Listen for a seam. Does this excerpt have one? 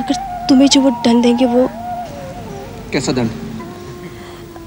no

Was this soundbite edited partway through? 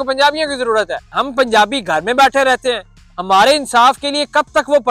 yes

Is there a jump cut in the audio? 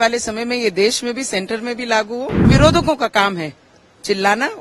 yes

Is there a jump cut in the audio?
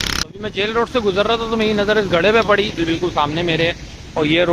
yes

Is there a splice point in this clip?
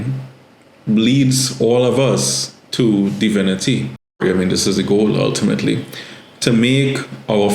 yes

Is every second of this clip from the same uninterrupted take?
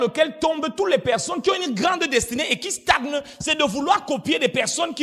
yes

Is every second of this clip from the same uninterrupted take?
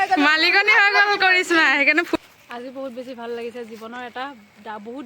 no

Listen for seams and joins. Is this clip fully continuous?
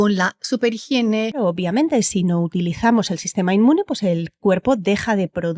no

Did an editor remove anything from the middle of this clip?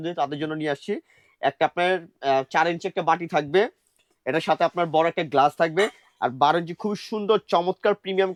no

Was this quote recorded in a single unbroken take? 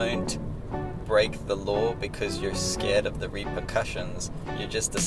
yes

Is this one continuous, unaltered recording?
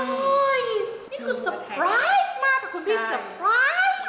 no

